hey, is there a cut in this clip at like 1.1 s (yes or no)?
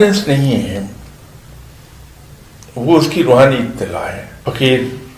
no